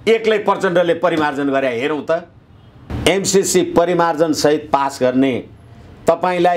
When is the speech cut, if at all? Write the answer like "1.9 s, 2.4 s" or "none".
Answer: 2.8 s

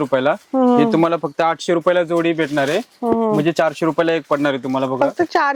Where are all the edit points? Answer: none

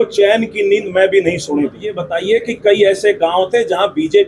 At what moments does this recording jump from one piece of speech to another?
2.1 s

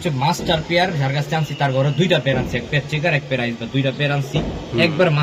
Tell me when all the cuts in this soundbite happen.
none

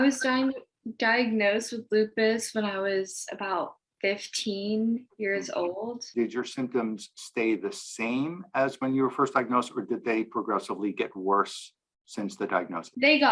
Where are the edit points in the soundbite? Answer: none

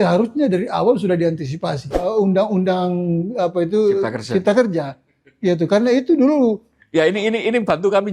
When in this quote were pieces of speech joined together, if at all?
2.1 s

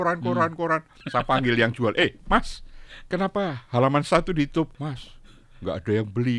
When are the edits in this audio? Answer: 1.0 s, 4.8 s

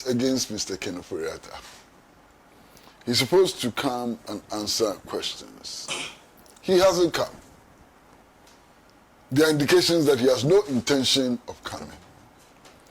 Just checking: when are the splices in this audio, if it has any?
4.0 s

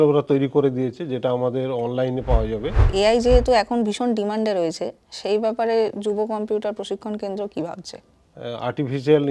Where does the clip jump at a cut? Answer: 2.8 s, 8.3 s

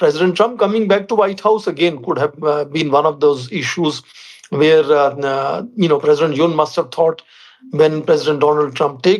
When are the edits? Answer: none

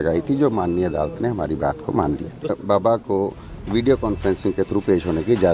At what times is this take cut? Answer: 2.5 s

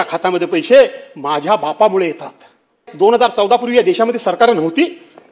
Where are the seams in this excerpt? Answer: 2.9 s

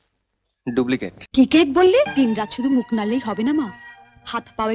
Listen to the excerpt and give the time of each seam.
1.2 s, 2.1 s

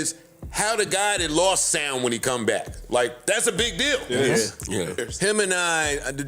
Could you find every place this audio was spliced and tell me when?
5.1 s

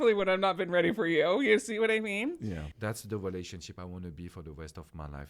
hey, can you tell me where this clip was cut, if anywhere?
2.6 s

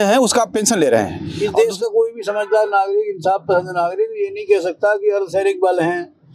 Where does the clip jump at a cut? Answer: 1.2 s

